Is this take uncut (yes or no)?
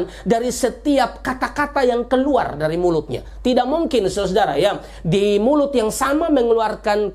yes